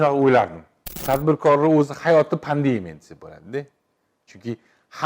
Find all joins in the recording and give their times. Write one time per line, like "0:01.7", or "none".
0:01.0